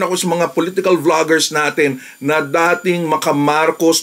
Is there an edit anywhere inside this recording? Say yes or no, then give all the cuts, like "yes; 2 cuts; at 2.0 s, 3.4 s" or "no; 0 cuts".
no; 0 cuts